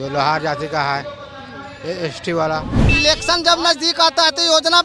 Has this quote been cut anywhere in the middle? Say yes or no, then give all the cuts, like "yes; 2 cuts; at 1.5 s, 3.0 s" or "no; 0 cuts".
yes; 1 cut; at 2.8 s